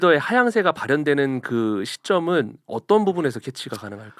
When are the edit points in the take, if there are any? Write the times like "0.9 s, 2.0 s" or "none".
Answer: 2.6 s